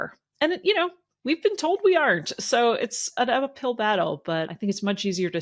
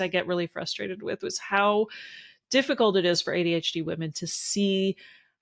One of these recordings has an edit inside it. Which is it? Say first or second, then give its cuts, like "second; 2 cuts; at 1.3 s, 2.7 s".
first; 2 cuts; at 3.1 s, 4.5 s